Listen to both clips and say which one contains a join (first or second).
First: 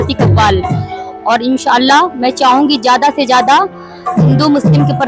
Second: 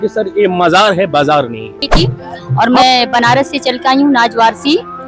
second